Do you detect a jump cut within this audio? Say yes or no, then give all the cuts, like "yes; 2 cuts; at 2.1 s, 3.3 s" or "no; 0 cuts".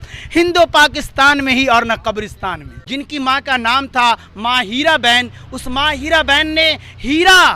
yes; 1 cut; at 2.7 s